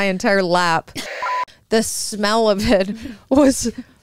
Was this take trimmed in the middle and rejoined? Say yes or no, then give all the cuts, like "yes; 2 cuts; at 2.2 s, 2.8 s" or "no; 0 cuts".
yes; 1 cut; at 1.4 s